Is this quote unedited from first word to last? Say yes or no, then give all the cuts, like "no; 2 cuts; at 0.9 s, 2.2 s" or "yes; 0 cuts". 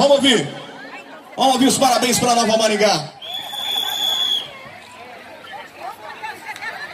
no; 1 cut; at 3.2 s